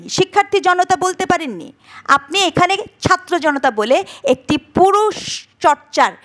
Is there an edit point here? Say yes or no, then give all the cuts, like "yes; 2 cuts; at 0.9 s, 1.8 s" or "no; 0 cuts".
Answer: no; 0 cuts